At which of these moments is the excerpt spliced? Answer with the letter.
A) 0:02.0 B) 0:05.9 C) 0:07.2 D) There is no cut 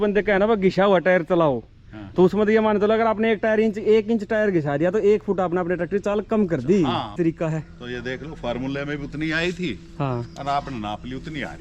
C